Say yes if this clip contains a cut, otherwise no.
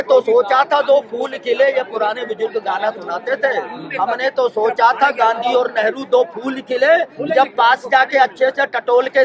no